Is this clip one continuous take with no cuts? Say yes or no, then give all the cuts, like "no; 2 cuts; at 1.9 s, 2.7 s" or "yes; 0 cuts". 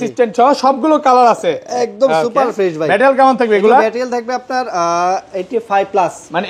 yes; 0 cuts